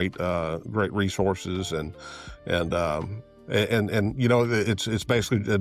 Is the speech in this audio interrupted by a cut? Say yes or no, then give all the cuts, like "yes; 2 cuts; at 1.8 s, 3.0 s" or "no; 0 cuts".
no; 0 cuts